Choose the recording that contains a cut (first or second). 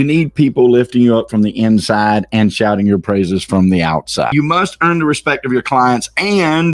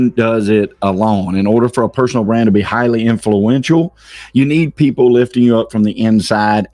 first